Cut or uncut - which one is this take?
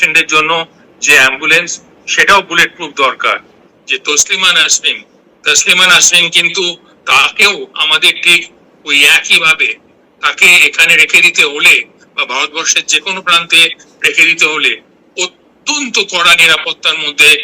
cut